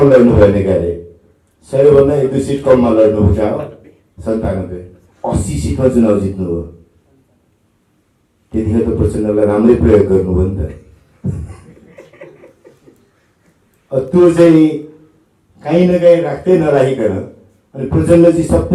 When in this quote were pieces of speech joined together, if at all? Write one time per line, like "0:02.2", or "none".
none